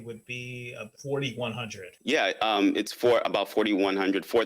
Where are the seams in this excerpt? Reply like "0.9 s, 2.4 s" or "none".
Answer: 1.9 s